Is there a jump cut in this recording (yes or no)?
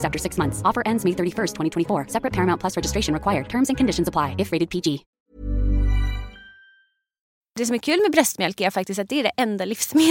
yes